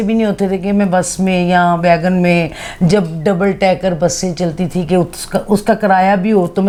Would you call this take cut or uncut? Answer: uncut